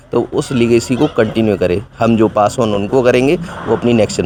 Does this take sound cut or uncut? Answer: uncut